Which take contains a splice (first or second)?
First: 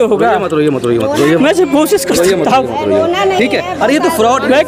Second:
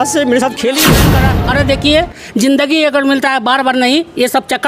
second